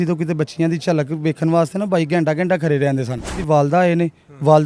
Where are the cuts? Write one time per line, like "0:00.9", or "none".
0:03.4